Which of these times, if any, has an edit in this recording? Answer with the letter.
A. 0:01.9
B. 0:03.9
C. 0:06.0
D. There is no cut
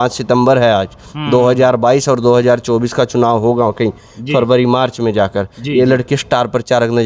D